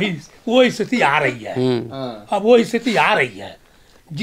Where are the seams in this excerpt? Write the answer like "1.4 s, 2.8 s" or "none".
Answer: none